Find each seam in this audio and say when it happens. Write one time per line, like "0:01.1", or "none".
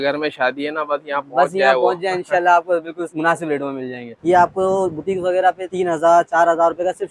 0:03.0
0:04.1
0:05.7